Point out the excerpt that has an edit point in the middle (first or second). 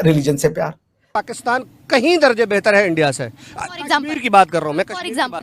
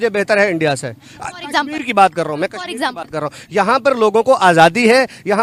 first